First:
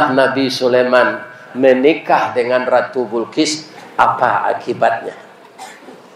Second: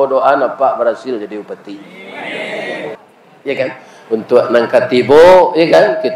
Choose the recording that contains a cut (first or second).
second